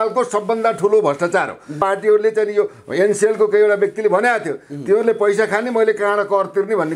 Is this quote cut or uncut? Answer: cut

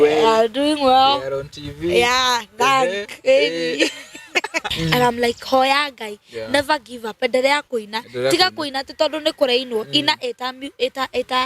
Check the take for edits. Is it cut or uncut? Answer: cut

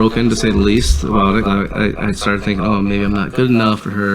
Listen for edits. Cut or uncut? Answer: cut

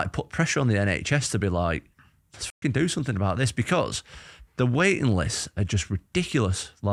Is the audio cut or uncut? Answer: uncut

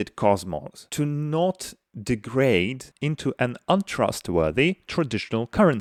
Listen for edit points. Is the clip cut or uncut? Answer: uncut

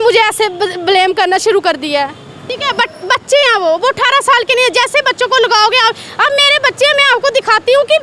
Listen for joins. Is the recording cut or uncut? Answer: cut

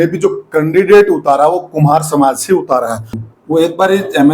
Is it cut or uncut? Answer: cut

